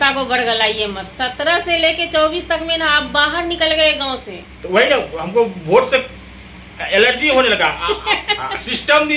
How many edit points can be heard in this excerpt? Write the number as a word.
zero